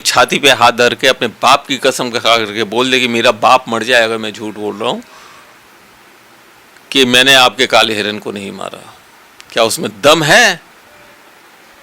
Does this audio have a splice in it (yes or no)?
no